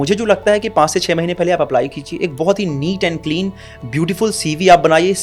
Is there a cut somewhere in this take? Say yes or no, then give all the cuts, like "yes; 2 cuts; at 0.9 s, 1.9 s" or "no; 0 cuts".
no; 0 cuts